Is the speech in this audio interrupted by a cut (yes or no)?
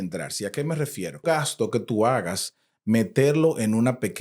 yes